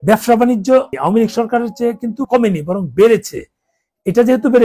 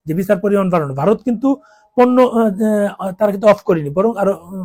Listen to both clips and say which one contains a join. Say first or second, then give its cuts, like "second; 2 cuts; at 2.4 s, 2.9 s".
first; 2 cuts; at 0.9 s, 2.2 s